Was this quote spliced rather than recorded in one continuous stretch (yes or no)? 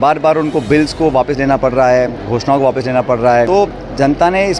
yes